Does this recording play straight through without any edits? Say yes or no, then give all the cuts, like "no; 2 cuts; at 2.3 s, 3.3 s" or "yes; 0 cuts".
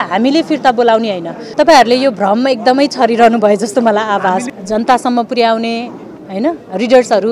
no; 2 cuts; at 1.3 s, 4.5 s